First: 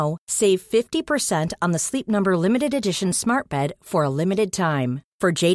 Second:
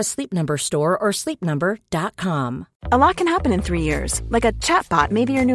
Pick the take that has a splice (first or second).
second